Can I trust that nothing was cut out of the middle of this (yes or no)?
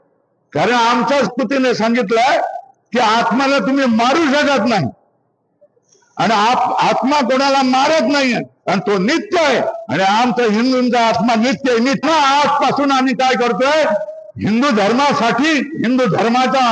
no